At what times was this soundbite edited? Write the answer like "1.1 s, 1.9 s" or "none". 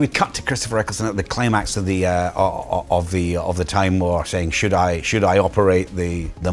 none